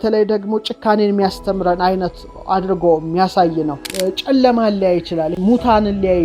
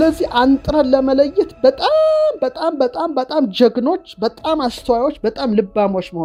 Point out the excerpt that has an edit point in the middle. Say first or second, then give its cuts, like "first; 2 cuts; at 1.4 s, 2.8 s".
first; 2 cuts; at 3.8 s, 5.3 s